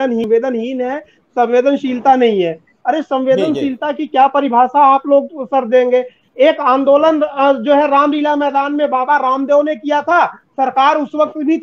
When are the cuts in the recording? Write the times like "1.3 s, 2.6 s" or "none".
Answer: none

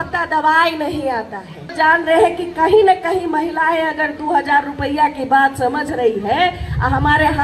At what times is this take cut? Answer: 1.7 s

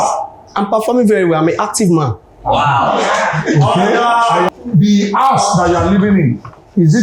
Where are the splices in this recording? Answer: 4.5 s

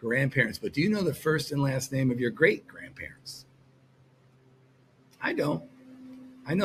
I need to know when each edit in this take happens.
none

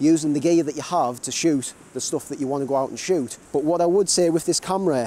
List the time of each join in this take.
3.4 s

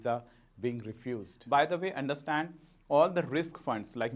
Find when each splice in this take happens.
1.3 s

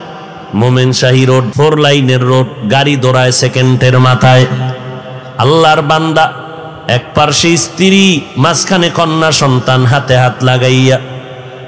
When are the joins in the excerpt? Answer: 1.5 s

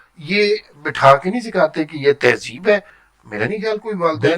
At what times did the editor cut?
3.0 s

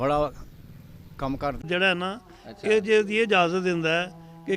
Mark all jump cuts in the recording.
1.6 s

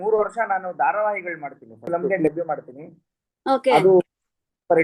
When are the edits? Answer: 1.9 s

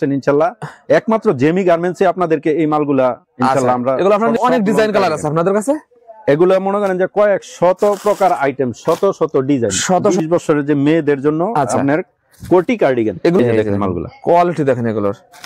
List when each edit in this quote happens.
4.4 s, 10.2 s, 13.4 s

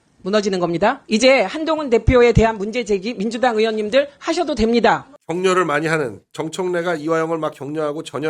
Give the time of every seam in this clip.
1.0 s, 5.2 s

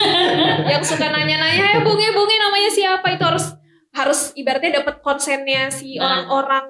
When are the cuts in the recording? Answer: none

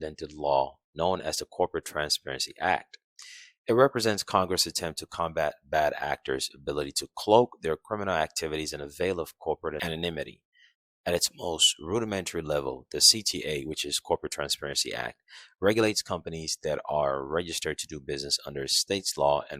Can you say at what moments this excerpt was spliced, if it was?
none

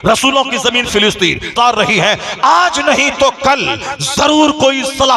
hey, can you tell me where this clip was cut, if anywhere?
1.5 s

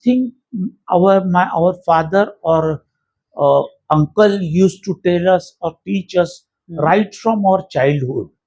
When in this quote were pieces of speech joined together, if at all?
none

